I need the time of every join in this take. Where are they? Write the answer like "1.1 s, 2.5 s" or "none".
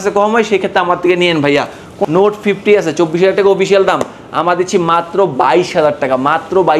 2.0 s